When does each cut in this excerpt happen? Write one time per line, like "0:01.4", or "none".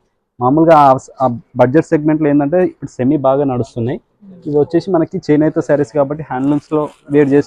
none